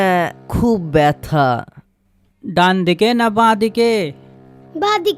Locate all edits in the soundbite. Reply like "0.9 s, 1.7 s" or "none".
none

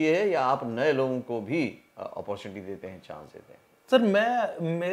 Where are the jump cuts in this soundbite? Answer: none

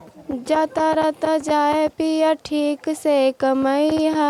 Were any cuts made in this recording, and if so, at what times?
none

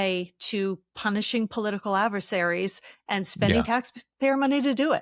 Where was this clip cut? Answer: none

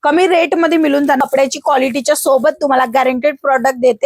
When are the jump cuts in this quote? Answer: 1.2 s

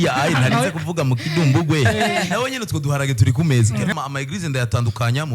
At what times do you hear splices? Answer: 3.9 s

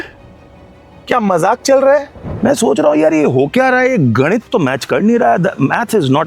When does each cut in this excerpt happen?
2.2 s

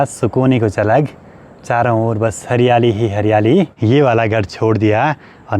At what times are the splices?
3.7 s

